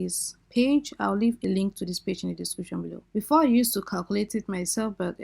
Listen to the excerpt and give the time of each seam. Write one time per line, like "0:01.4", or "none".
0:01.4
0:03.0